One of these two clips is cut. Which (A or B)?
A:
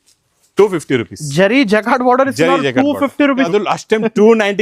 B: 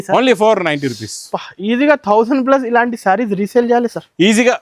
A